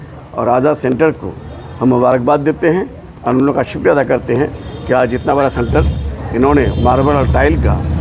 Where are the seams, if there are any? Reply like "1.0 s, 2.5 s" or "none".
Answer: none